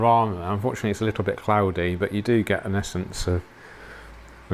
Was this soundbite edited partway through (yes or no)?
no